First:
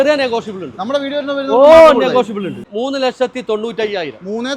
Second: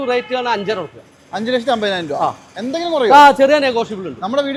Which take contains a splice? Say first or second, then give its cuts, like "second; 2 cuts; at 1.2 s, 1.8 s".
first; 1 cut; at 2.6 s